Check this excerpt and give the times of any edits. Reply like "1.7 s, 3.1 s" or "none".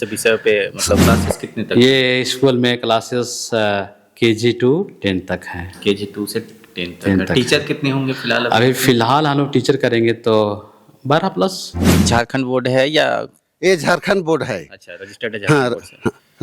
1.0 s, 12.0 s